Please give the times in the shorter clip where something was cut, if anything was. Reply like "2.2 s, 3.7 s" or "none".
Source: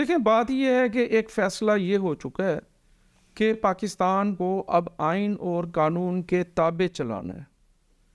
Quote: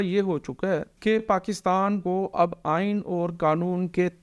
0.9 s